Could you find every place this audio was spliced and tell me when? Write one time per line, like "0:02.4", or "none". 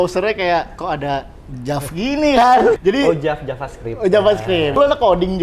0:02.8
0:04.8